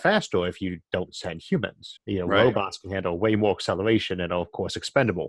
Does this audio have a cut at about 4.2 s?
no; 1 cut; at 1.9 s

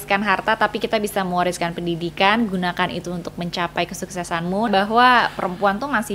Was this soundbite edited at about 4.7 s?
yes; 1 cut; at 4.7 s

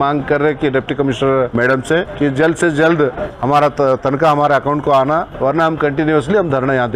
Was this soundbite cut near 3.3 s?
yes; 3 cuts; at 1.7 s, 3.3 s, 5.3 s

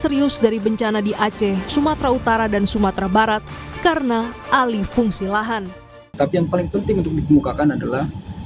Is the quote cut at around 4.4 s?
no; 1 cut; at 6.0 s

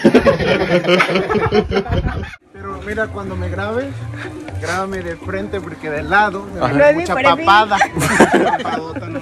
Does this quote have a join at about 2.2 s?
yes; 1 cut; at 2.2 s

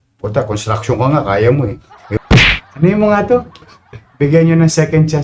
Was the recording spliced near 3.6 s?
no; 1 cut; at 2.2 s

